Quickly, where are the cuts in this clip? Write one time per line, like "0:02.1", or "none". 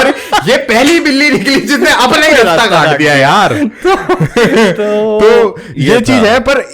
none